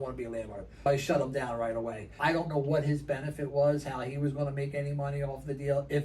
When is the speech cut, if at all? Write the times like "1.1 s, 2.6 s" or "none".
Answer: 0.9 s, 2.1 s